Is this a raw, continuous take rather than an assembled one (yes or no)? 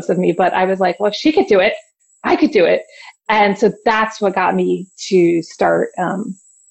yes